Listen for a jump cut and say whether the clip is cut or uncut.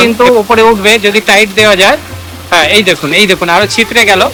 uncut